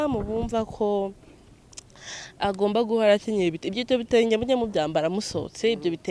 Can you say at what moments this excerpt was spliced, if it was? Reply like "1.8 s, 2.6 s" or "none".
none